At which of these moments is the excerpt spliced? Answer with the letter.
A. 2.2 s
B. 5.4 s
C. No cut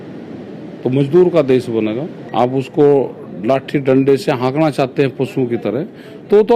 A